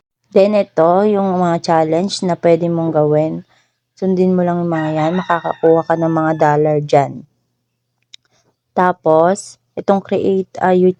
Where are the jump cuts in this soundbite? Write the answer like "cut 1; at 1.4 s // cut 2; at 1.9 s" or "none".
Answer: none